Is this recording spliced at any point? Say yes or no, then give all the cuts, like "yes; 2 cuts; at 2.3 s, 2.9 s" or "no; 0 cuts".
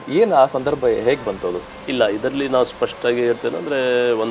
no; 0 cuts